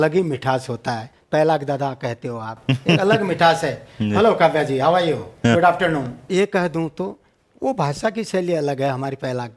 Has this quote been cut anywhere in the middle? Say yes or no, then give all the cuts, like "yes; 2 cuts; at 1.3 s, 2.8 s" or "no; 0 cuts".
yes; 2 cuts; at 1.1 s, 6.2 s